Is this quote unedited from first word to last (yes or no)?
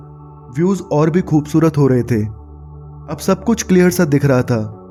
yes